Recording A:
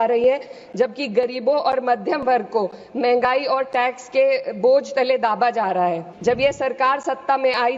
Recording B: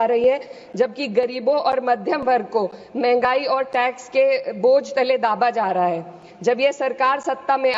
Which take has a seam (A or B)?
A